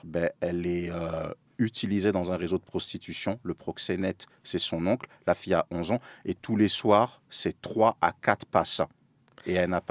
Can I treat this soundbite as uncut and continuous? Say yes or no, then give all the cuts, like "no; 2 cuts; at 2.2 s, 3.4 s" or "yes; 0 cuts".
yes; 0 cuts